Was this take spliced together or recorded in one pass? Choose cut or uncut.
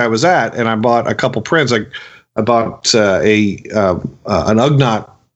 uncut